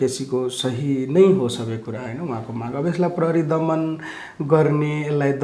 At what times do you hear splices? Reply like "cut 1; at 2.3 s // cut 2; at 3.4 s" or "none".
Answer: none